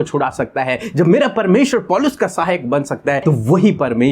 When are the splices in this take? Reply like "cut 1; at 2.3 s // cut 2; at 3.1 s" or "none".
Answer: cut 1; at 3.2 s